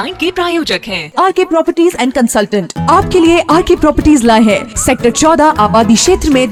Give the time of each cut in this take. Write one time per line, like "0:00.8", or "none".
none